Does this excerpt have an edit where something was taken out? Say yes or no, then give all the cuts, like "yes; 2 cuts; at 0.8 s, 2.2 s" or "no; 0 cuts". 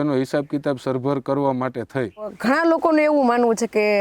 yes; 1 cut; at 2.3 s